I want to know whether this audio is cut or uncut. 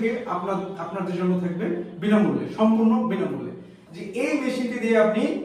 cut